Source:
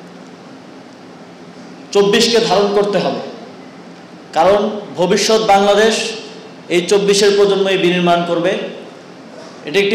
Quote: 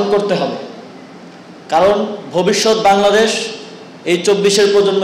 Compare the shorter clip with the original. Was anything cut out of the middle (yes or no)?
no